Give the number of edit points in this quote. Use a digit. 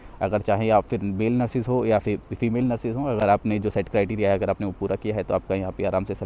0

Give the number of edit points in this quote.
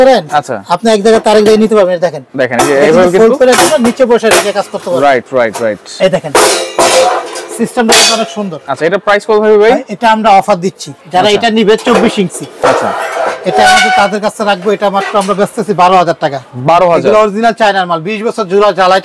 0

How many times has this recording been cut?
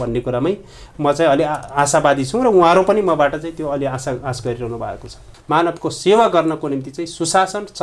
1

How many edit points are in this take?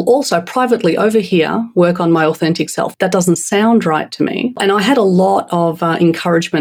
2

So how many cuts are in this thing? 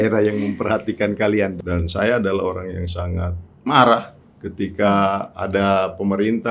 1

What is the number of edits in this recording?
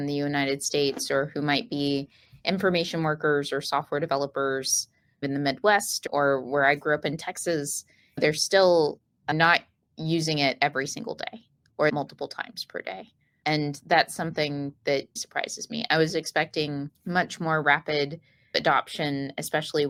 0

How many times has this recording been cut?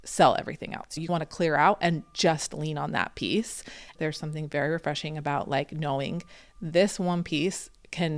2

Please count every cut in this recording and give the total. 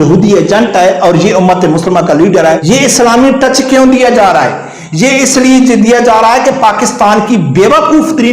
1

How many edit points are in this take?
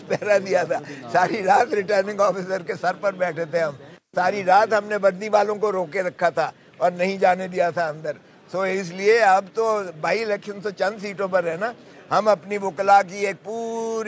0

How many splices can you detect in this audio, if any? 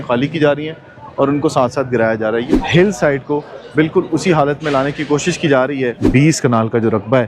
2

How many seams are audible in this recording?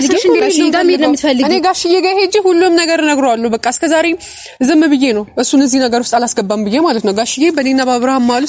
0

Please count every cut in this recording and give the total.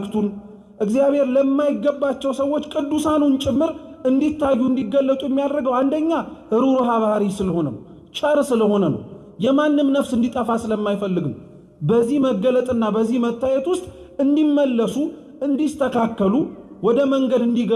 0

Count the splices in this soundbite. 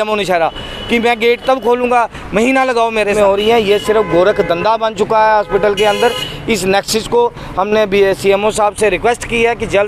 1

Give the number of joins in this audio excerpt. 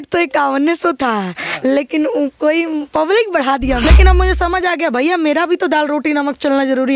1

